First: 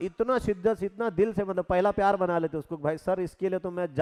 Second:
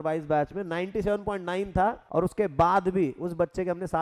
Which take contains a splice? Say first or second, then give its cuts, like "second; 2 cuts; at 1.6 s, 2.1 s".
second; 1 cut; at 2.0 s